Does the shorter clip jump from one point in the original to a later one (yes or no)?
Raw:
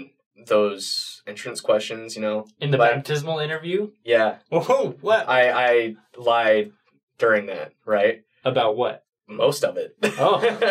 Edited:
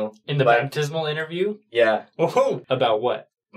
yes